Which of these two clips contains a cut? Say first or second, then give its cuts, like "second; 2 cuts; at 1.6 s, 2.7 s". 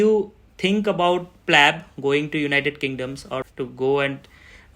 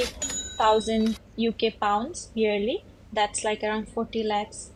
first; 1 cut; at 3.4 s